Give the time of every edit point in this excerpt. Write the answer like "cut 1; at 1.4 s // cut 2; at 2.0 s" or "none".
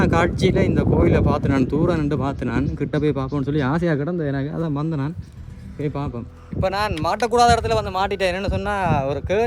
cut 1; at 6.4 s

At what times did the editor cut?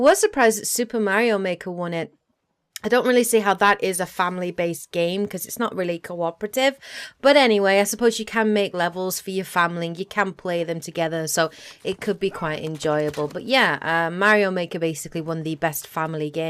cut 1; at 11.8 s

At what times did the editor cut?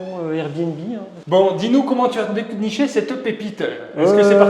cut 1; at 1.1 s

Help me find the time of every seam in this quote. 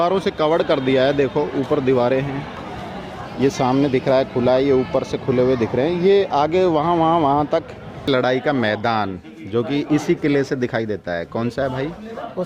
cut 1; at 8.1 s

